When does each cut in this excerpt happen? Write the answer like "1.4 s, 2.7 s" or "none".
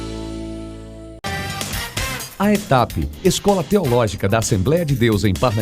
1.1 s